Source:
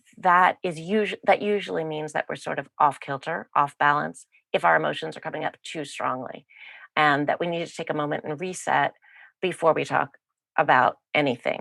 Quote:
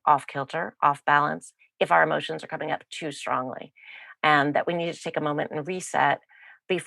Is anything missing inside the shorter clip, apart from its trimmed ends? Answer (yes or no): no